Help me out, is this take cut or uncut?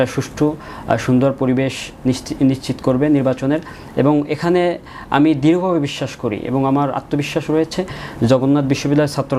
uncut